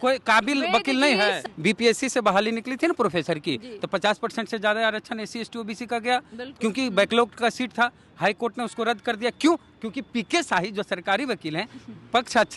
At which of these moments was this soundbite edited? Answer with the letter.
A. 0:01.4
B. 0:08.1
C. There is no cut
A